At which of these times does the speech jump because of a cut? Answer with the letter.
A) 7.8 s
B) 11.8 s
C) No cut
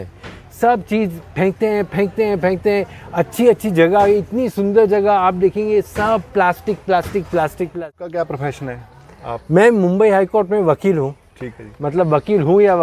A